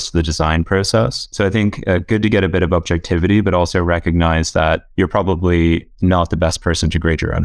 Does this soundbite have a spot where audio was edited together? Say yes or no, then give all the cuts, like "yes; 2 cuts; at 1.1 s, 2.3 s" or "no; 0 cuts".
yes; 2 cuts; at 1.2 s, 4.9 s